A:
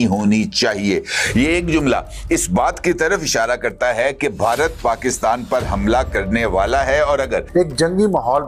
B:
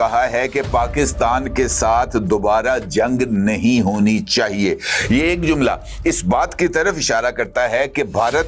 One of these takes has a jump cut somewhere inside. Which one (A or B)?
A